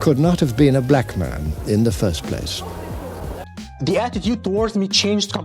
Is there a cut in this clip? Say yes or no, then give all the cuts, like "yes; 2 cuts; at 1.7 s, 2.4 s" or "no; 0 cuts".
yes; 1 cut; at 3.4 s